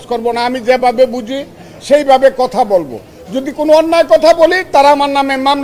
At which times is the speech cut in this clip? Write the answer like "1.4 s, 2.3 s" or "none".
none